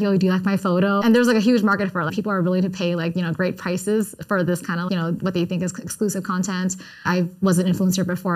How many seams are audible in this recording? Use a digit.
4